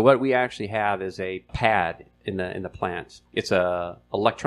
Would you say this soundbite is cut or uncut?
cut